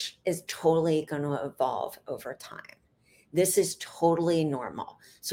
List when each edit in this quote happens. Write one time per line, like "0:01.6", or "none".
none